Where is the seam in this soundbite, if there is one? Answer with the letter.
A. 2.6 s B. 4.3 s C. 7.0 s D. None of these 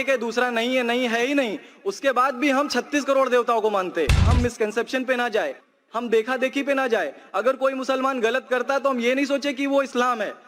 B